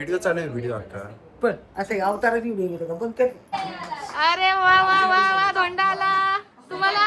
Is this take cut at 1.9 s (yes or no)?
no